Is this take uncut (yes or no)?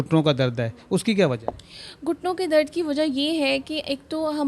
yes